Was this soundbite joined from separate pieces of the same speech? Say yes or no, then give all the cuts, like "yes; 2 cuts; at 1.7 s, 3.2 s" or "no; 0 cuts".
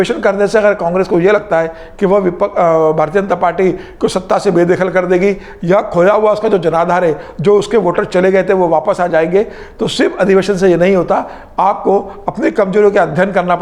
no; 0 cuts